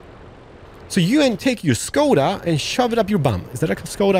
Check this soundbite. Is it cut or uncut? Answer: uncut